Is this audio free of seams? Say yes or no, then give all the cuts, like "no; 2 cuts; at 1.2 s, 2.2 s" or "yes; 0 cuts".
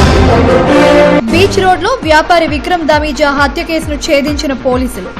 yes; 0 cuts